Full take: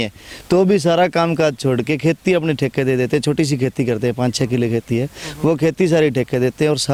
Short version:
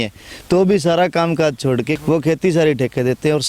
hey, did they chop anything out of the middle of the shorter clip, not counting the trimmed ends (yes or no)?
yes